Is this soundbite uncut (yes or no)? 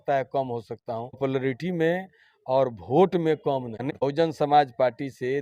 yes